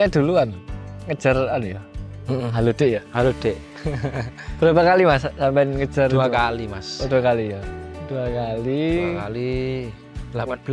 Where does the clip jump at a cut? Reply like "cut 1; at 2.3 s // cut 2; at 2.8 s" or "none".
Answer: none